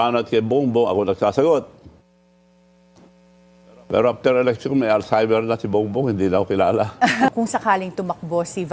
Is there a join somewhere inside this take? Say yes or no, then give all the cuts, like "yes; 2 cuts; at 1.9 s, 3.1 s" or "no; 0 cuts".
yes; 1 cut; at 7.3 s